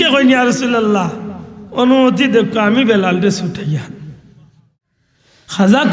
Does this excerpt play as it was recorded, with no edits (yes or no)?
no